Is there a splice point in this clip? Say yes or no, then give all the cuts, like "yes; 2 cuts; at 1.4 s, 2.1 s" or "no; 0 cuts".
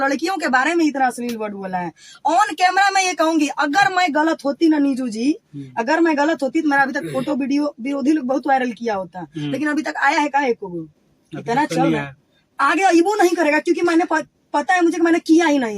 no; 0 cuts